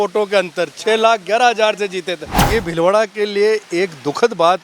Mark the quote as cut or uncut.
cut